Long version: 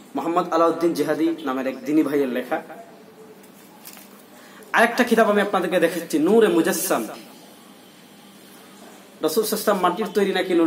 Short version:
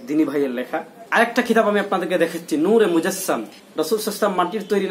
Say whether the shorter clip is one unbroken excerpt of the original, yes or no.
no